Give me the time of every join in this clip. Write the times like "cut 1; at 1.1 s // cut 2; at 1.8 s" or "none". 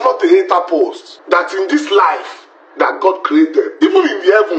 cut 1; at 1.1 s